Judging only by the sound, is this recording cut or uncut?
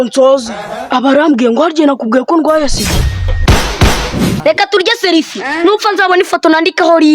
cut